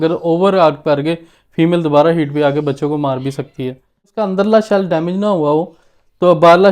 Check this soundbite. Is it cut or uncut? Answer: cut